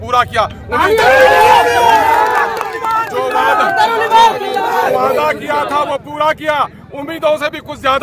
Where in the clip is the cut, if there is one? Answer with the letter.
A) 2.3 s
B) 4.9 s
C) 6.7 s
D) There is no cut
B